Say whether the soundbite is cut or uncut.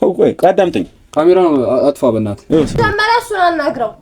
cut